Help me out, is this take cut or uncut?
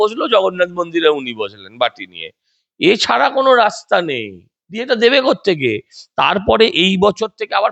uncut